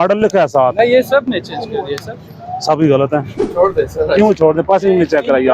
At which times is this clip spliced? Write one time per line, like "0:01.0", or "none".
0:03.4